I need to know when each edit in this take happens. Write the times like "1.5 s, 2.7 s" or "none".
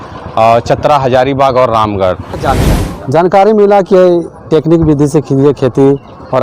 2.4 s